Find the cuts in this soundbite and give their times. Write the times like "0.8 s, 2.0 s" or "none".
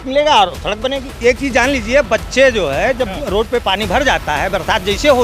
1.1 s